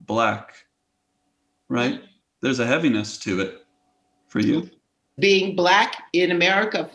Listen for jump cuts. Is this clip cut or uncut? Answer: cut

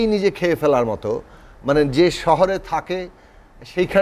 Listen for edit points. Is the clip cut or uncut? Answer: uncut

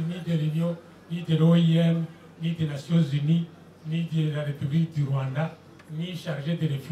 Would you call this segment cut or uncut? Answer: uncut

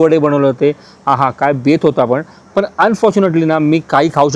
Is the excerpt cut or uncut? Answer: uncut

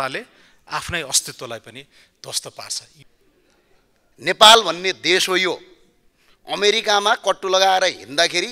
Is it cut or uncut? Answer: cut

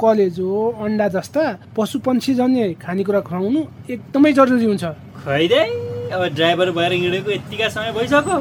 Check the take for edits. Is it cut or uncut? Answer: cut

